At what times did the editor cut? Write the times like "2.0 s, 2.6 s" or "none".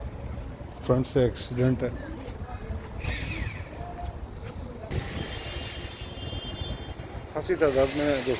4.9 s